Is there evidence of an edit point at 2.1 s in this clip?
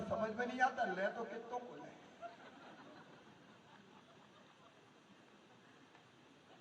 no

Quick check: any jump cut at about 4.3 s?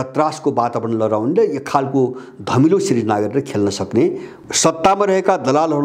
yes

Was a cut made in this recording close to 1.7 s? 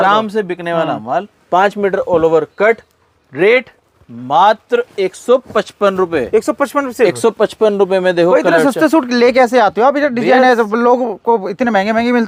no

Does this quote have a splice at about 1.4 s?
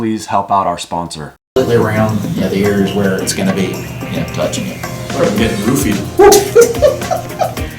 yes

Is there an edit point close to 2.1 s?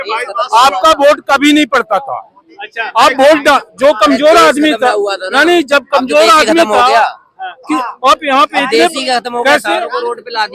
no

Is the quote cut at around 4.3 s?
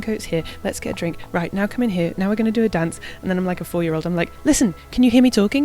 no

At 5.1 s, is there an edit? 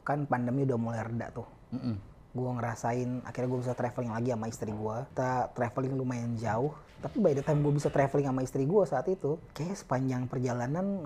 yes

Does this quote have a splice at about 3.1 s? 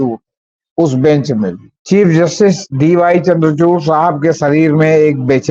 no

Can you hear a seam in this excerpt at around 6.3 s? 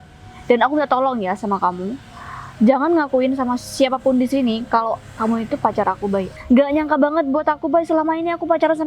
yes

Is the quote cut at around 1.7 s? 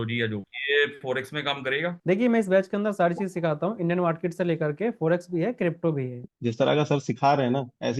no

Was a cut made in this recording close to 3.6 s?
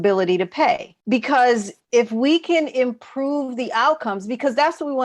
no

